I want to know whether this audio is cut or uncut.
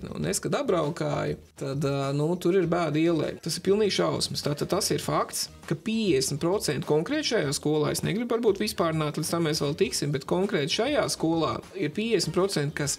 cut